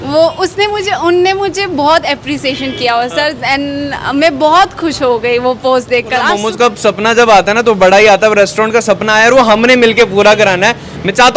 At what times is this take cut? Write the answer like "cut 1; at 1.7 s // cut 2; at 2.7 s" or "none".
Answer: cut 1; at 6.3 s